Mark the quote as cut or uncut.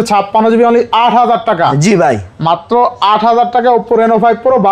uncut